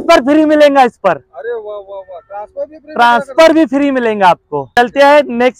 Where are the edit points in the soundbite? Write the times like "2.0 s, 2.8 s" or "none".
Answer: none

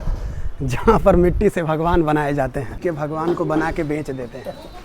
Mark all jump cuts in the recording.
2.7 s

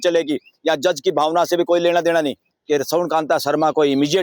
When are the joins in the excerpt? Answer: 2.5 s

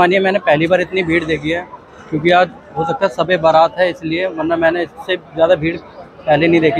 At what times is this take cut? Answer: none

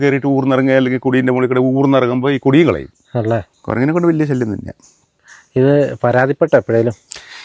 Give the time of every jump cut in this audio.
3.5 s

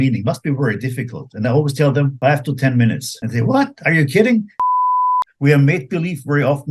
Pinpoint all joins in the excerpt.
2.1 s, 3.1 s, 4.9 s

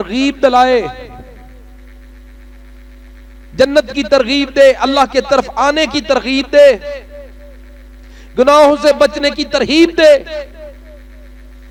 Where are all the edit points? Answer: none

